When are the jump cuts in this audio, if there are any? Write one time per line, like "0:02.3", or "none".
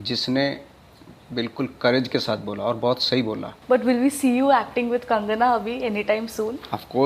0:03.5